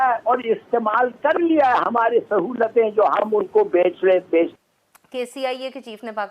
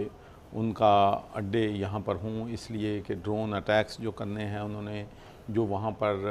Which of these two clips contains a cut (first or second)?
first